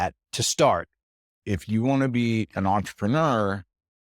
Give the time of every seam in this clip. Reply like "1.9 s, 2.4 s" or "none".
1.4 s